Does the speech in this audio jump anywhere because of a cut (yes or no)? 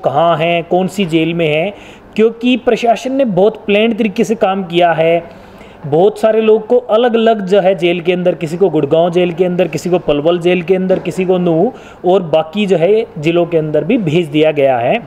no